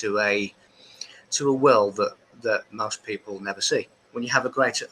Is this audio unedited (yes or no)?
no